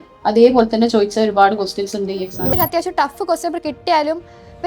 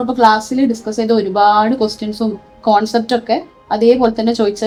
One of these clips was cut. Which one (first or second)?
first